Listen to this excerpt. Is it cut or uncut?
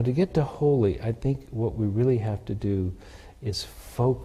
uncut